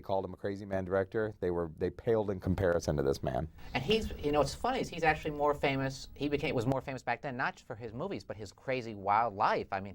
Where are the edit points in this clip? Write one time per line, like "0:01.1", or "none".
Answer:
none